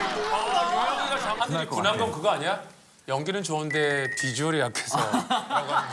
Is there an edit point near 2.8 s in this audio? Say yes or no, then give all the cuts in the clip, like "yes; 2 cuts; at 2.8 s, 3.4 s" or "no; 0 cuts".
no; 1 cut; at 1.4 s